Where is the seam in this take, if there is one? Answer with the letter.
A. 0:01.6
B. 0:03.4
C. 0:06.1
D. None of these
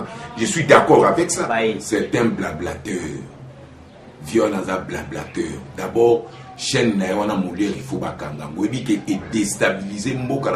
A